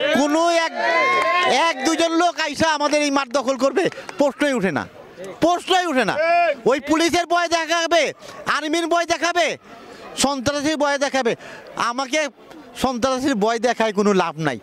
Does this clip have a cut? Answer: no; 0 cuts

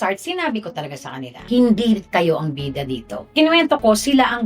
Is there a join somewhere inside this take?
yes; 2 cuts; at 1.4 s, 3.2 s

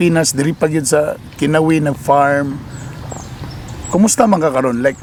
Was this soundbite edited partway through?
no; 0 cuts

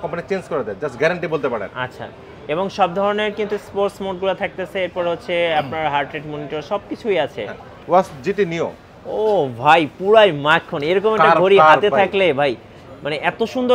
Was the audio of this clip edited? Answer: yes; 1 cut; at 7.7 s

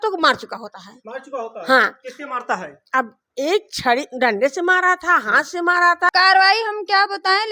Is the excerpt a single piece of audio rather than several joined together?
no; 1 cut; at 6.1 s

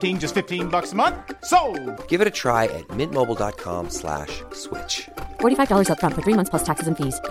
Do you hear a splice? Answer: no; 0 cuts

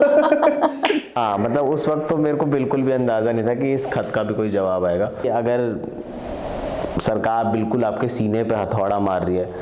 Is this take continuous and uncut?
no; 1 cut; at 5.2 s

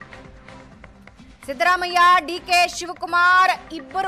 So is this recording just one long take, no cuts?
yes; 0 cuts

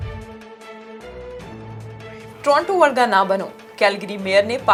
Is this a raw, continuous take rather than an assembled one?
yes; 0 cuts

